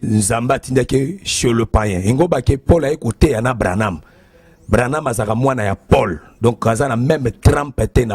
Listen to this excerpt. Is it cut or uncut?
uncut